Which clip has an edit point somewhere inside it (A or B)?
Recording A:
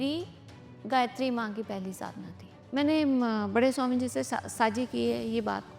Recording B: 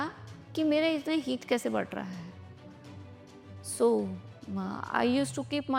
A